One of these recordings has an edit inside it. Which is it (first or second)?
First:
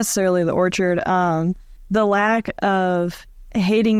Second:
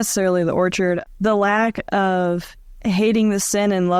second